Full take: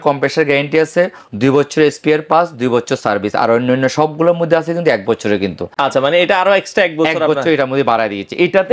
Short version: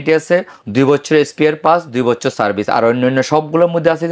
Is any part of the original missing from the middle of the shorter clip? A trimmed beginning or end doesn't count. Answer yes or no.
no